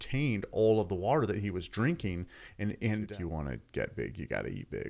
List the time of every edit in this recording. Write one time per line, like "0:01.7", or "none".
0:03.1

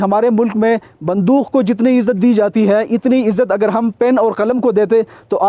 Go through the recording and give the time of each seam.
none

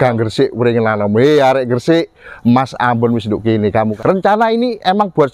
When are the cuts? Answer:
0:03.9

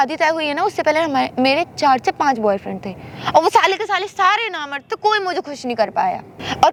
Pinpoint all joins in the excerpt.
none

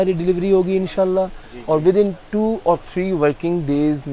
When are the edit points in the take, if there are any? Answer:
none

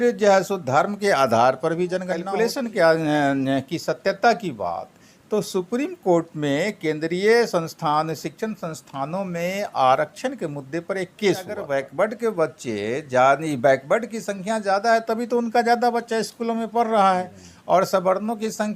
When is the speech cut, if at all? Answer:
0:02.3
0:11.6

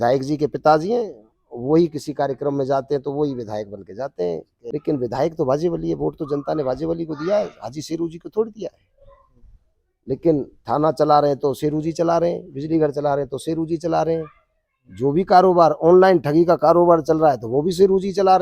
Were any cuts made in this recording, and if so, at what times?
0:04.5

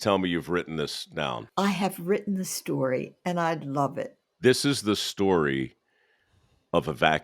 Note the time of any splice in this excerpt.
0:01.4
0:04.2

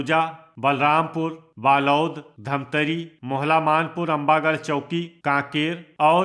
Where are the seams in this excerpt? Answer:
none

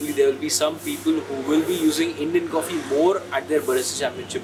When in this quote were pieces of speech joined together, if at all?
none

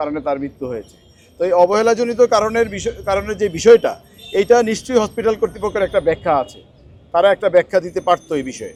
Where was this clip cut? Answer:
none

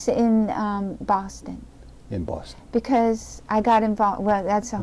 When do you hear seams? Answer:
none

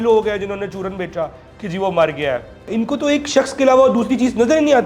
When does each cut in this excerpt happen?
0:02.6

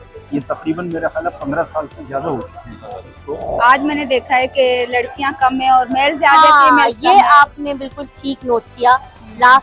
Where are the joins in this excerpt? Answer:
0:03.4

